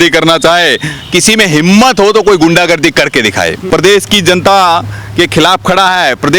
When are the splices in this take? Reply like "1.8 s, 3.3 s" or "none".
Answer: 3.6 s